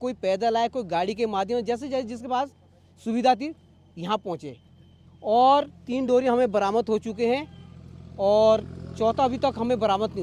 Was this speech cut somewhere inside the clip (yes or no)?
no